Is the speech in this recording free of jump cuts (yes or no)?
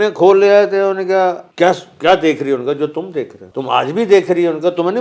no